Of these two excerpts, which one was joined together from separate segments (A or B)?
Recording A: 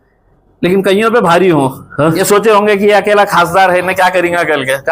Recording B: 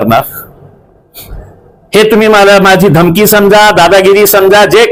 A